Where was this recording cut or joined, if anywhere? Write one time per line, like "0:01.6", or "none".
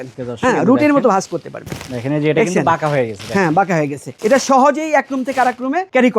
none